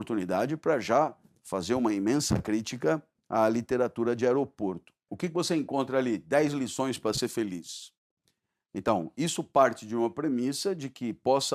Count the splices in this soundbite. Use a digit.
1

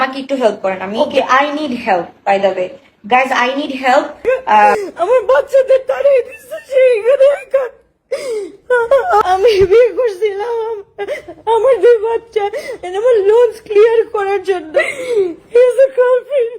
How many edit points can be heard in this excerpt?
3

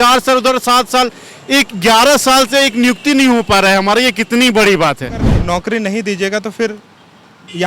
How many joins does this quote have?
1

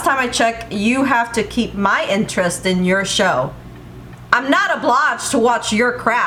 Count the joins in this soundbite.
0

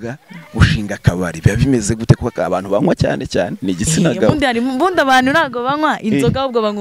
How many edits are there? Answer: 0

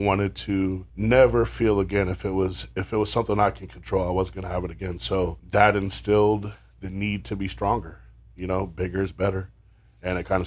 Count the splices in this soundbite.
2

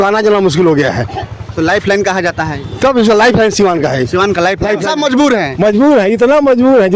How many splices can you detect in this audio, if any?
1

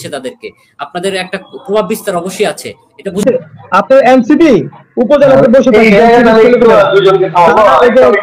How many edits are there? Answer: 1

